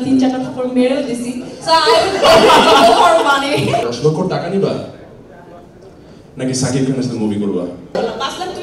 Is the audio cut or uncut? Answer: cut